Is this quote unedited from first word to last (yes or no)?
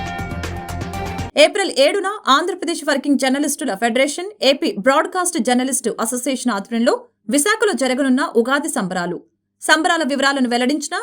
no